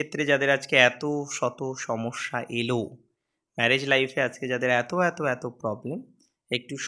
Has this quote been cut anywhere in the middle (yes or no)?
no